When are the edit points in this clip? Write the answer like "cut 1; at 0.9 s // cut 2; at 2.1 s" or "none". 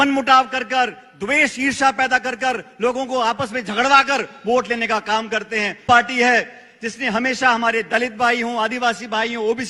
cut 1; at 5.8 s